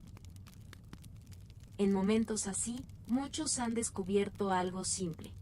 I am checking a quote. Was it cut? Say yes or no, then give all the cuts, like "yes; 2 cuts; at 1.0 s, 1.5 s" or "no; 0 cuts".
yes; 1 cut; at 1.8 s